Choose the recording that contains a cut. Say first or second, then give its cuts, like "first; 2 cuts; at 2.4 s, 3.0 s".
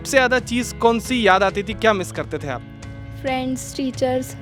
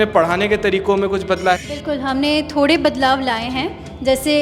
second; 1 cut; at 1.6 s